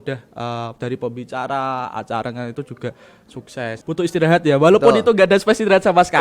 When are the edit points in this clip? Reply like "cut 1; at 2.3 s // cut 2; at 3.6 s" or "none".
cut 1; at 3.8 s